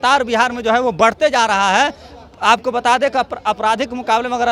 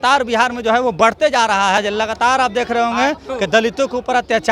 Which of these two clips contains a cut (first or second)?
second